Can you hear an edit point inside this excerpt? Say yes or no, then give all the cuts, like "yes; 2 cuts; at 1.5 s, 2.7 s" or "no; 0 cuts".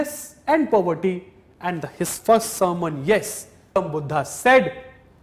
yes; 1 cut; at 3.8 s